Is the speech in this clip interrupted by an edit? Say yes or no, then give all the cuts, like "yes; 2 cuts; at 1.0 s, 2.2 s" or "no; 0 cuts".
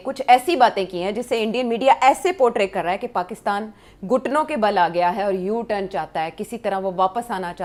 no; 0 cuts